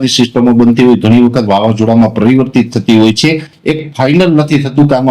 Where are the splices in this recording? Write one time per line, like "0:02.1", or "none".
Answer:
0:03.5